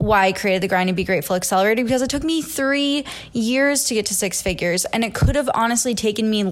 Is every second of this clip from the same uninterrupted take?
yes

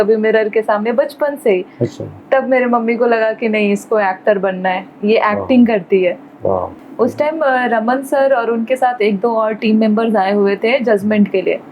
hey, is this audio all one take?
no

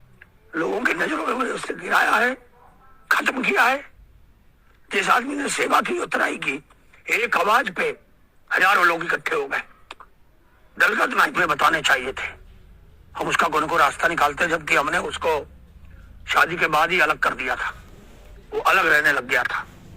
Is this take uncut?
no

